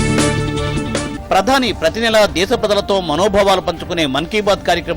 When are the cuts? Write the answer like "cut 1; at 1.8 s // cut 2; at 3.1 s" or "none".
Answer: cut 1; at 0.9 s